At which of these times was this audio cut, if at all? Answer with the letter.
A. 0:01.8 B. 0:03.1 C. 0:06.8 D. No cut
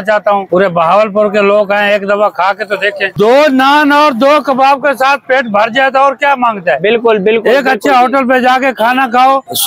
B